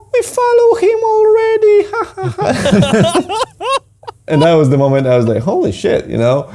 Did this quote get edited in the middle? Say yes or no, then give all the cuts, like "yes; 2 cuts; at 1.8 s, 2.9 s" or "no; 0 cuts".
yes; 1 cut; at 4.3 s